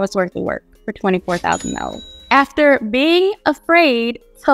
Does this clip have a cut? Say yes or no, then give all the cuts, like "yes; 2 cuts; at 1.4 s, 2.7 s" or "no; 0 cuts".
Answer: yes; 1 cut; at 2.1 s